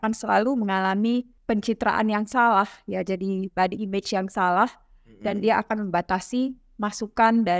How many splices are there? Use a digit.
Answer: 1